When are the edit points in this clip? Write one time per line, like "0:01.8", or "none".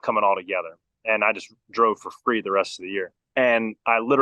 0:03.2